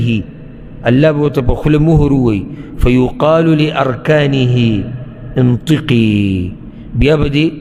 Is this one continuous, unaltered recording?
yes; 0 cuts

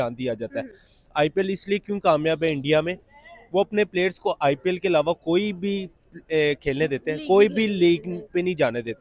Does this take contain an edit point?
no; 0 cuts

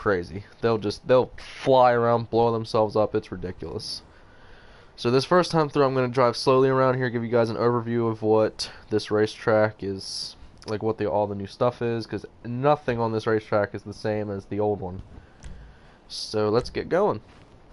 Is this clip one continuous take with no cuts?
yes; 0 cuts

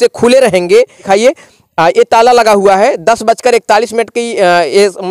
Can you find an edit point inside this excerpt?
yes; 1 cut; at 1.0 s

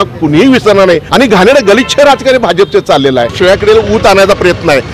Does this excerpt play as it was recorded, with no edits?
no; 2 cuts; at 1.1 s, 3.3 s

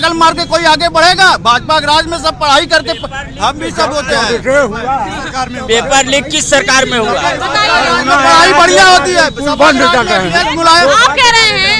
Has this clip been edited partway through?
no; 0 cuts

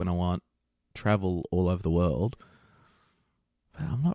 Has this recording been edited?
no; 0 cuts

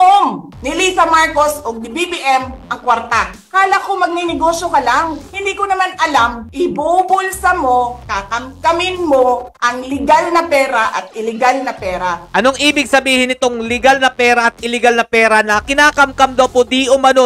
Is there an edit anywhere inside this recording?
yes; 3 cuts; at 3.3 s, 5.3 s, 6.4 s

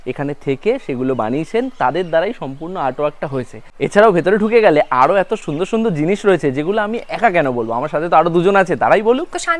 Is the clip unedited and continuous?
yes; 0 cuts

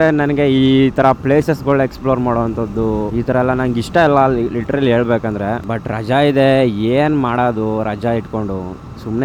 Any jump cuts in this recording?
no; 0 cuts

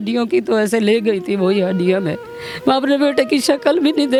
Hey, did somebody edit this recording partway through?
no; 0 cuts

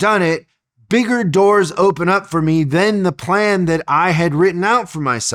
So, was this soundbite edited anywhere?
no; 0 cuts

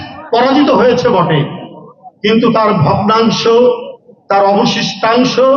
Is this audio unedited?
yes; 0 cuts

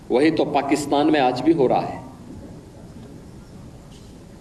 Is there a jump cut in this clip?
no; 0 cuts

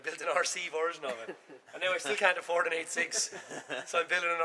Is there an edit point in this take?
no; 0 cuts

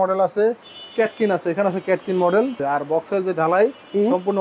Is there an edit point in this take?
yes; 1 cut; at 2.6 s

